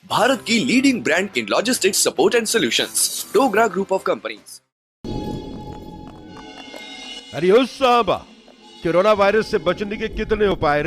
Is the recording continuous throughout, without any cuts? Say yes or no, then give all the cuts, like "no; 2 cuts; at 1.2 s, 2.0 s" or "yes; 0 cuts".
no; 1 cut; at 4.9 s